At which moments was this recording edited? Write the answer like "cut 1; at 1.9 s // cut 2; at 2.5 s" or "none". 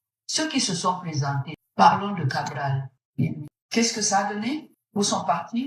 none

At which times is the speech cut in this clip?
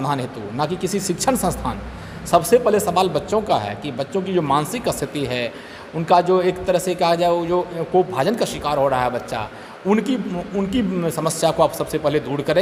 none

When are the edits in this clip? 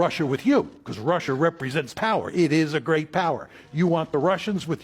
none

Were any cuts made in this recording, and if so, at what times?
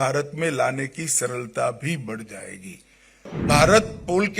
cut 1; at 3.3 s

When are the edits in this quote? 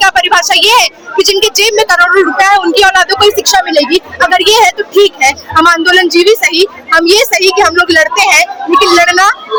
none

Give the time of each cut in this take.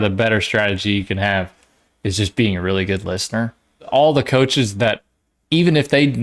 cut 1; at 3.9 s

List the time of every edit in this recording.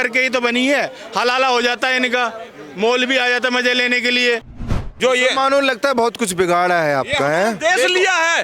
cut 1; at 4.7 s

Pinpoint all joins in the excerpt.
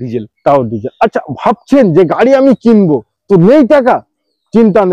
none

